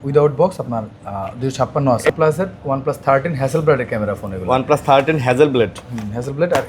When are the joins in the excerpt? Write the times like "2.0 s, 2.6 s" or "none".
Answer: 2.1 s